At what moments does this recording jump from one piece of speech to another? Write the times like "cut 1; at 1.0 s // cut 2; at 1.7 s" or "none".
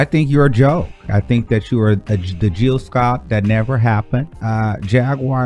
cut 1; at 1.0 s // cut 2; at 4.4 s